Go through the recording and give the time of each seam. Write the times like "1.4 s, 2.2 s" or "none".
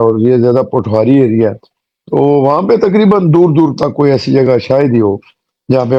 none